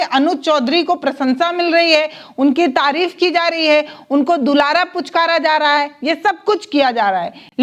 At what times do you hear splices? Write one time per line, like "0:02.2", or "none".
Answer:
none